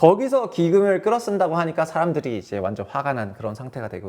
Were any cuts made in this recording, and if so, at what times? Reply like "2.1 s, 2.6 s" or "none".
none

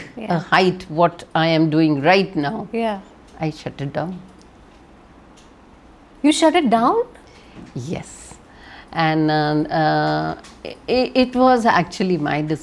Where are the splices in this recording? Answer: none

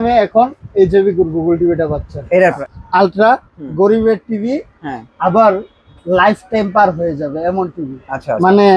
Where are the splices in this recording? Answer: 2.6 s

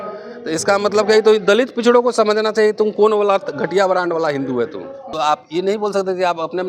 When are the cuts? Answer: 5.0 s

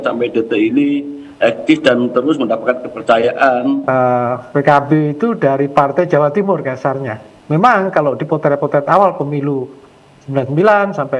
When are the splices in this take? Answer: 3.8 s

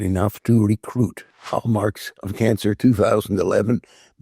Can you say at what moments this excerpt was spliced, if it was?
1.5 s

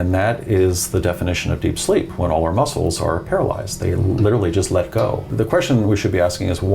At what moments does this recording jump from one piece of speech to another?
5.3 s

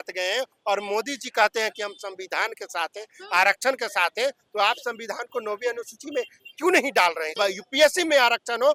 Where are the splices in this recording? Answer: 7.4 s

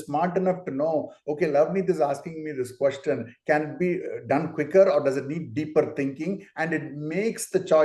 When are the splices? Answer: none

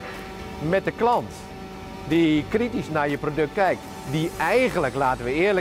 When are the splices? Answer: 2.8 s

